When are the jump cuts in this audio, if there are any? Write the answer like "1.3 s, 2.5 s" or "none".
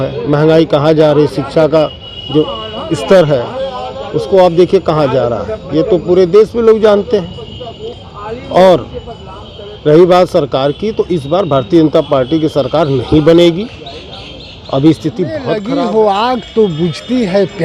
15.6 s